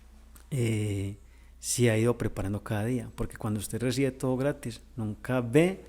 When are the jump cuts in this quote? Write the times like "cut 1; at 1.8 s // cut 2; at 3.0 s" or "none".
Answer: none